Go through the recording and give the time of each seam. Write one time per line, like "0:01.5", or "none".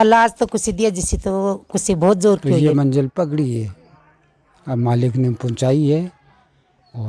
0:02.6